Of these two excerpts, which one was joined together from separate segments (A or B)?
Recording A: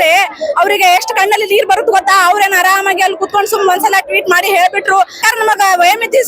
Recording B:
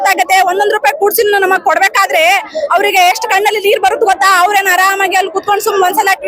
A